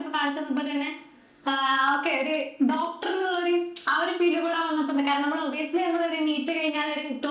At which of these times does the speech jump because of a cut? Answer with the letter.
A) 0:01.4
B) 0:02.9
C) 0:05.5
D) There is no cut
D